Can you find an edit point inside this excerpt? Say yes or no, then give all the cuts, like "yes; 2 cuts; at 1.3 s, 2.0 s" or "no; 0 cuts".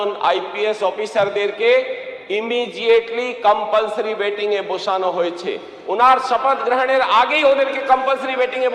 no; 0 cuts